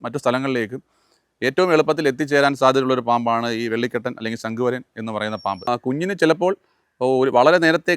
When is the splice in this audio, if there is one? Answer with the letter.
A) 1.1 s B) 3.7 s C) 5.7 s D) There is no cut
C